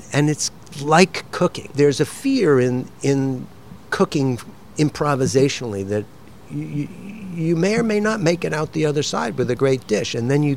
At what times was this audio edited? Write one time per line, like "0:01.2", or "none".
none